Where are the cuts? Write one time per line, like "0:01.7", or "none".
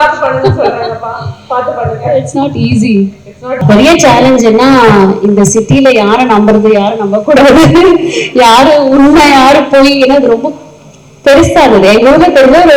0:03.6